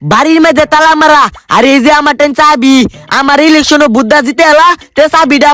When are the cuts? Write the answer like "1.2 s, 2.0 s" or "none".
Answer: none